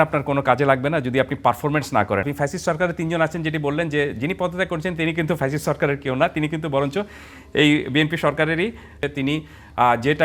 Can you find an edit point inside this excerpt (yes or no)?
yes